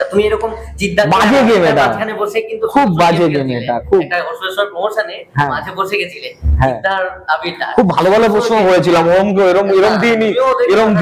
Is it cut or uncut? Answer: uncut